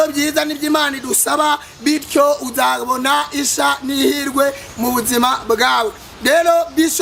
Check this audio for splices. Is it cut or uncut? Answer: uncut